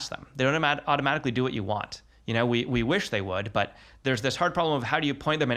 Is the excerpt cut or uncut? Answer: uncut